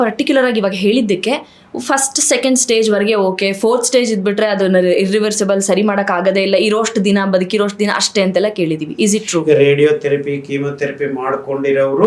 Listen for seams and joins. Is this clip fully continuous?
yes; 0 cuts

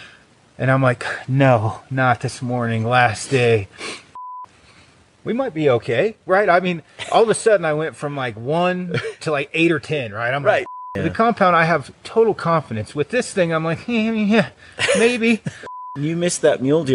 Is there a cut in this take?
yes; 3 cuts; at 4.3 s, 10.8 s, 15.7 s

